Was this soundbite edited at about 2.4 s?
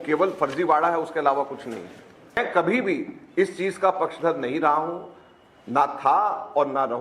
yes; 1 cut; at 2.4 s

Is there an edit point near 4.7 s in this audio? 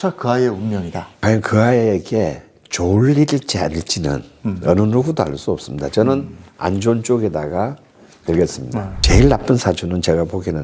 no; 2 cuts; at 1.0 s, 8.9 s

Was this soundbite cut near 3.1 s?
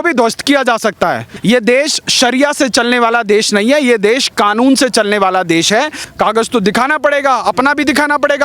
no; 2 cuts; at 1.3 s, 6.0 s

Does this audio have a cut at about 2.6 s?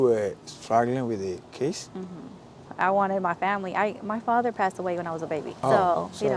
yes; 2 cuts; at 2.6 s, 5.5 s

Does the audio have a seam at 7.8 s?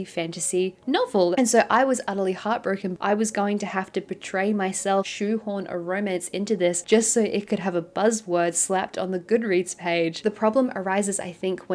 no; 4 cuts; at 1.3 s, 2.9 s, 5.1 s, 10.2 s

